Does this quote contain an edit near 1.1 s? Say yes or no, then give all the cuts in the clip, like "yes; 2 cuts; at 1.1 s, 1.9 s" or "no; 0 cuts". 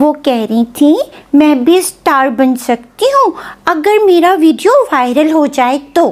no; 0 cuts